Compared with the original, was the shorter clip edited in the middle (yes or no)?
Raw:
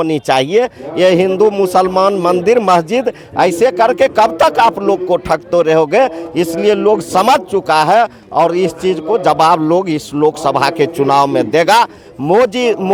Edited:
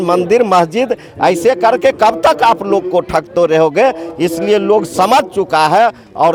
no